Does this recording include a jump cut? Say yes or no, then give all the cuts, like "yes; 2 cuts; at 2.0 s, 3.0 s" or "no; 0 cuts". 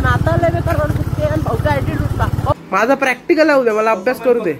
yes; 1 cut; at 2.5 s